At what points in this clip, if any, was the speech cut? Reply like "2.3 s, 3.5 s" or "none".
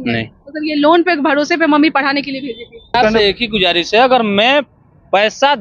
2.9 s